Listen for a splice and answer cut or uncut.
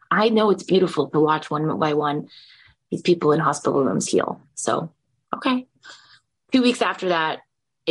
cut